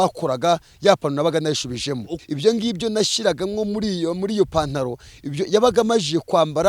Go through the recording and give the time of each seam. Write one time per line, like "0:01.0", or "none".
0:02.2

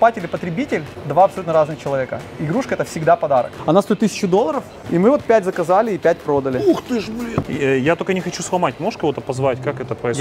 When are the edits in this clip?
0:00.9
0:03.5
0:04.7
0:07.5

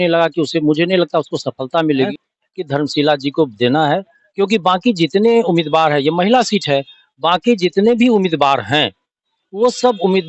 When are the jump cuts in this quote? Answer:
0:02.1

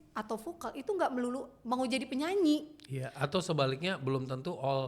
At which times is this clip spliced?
none

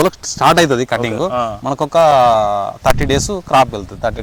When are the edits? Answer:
none

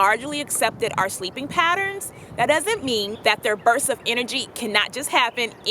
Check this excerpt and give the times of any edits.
0:03.1

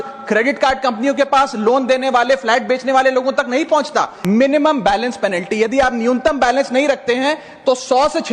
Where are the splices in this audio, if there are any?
0:04.1

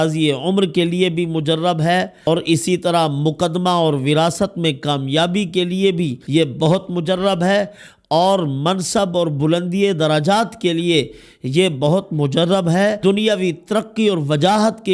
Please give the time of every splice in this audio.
0:02.1
0:06.2
0:13.0

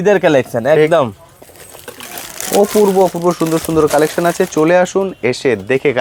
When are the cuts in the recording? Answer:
none

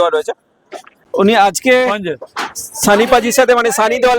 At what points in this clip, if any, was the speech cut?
0:01.0

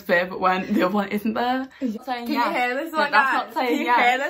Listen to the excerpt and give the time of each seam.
0:01.8

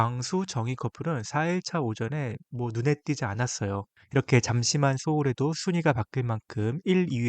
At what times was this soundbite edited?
none

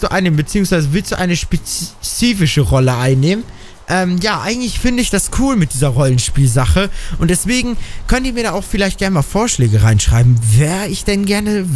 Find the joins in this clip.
none

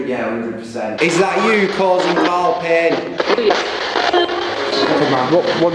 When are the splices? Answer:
0:00.9
0:03.1

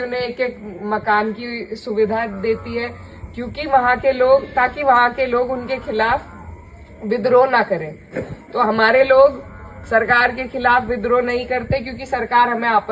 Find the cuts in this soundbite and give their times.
none

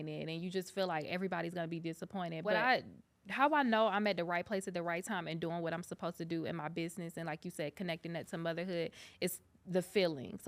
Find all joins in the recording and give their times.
0:02.6

